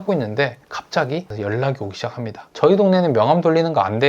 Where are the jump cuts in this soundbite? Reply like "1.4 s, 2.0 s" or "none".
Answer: 1.3 s